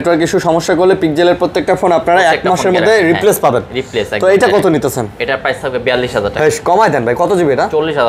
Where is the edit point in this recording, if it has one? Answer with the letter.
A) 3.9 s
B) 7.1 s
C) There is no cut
C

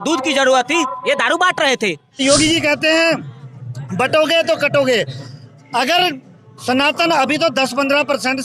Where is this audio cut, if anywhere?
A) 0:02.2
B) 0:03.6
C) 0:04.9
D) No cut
A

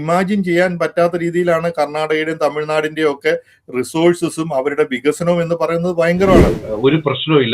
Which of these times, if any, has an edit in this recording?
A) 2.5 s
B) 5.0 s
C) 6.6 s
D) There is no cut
C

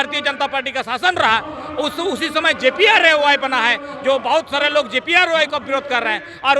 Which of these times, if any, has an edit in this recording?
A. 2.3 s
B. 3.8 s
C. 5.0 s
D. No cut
D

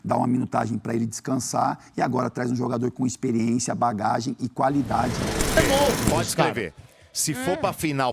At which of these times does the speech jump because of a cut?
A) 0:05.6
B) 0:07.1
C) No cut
A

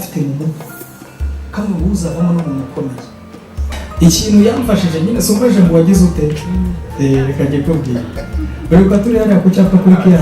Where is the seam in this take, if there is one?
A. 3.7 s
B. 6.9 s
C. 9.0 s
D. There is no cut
A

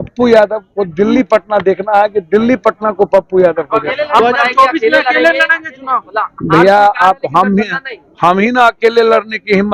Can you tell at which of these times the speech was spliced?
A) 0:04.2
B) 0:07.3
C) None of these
A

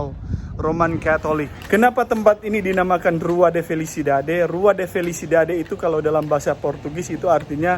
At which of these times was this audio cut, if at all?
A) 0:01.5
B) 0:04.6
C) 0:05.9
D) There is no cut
A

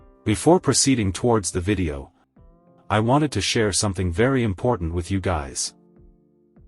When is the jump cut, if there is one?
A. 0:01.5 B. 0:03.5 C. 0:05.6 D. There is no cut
C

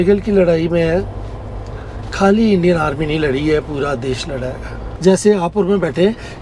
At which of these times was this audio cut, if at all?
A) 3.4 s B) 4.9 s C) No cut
B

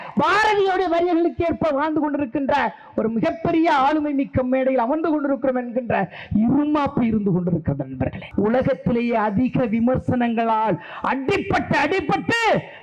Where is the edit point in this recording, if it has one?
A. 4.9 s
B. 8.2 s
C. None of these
B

